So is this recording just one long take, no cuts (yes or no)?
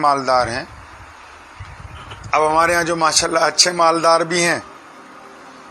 no